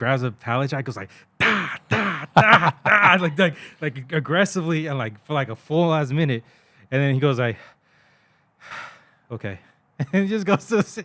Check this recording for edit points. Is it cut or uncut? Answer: uncut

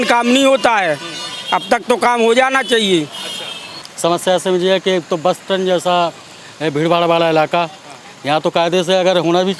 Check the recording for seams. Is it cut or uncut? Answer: cut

